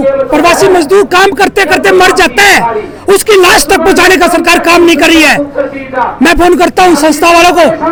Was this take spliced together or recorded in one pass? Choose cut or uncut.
uncut